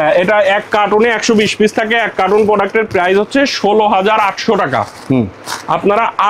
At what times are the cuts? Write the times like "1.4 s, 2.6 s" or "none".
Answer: none